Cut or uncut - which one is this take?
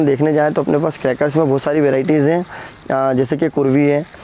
uncut